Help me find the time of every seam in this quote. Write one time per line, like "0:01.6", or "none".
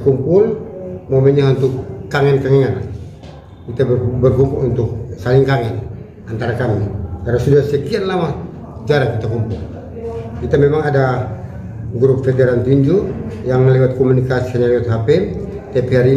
none